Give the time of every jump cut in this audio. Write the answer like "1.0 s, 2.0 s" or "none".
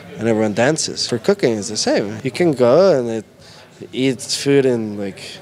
0.9 s, 2.2 s